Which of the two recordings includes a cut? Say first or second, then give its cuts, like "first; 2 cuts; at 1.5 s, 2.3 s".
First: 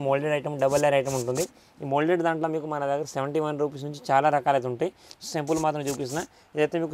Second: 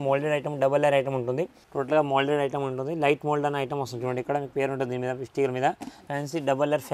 second; 2 cuts; at 1.6 s, 5.9 s